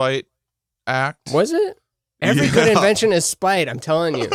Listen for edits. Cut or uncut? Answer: uncut